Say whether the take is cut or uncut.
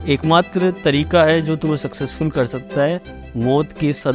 uncut